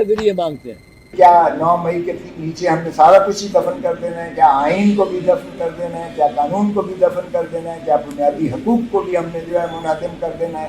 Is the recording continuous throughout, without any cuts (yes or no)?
no